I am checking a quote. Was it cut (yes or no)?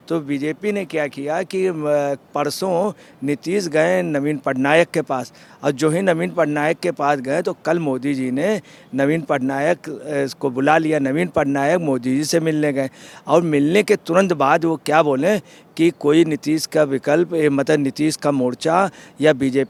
no